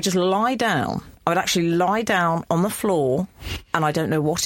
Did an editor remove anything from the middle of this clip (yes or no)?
no